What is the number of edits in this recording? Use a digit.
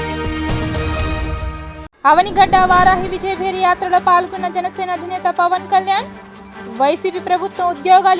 1